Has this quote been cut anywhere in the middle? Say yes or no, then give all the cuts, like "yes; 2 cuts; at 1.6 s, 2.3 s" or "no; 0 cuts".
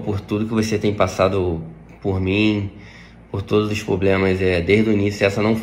no; 0 cuts